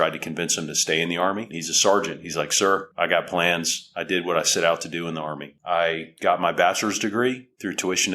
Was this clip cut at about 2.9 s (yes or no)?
yes